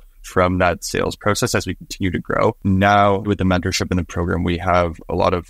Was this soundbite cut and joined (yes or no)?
yes